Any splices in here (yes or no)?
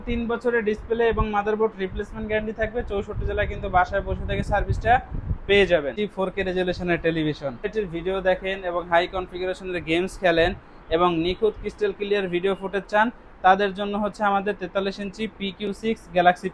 yes